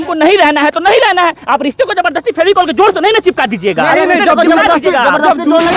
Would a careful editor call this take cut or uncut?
uncut